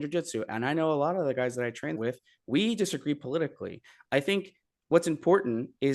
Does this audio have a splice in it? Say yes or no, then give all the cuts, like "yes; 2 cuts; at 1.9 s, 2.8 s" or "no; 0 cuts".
no; 0 cuts